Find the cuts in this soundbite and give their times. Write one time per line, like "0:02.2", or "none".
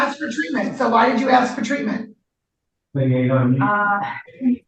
none